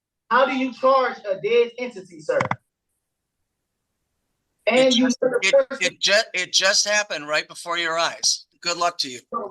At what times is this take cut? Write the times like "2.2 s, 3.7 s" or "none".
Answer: 8.5 s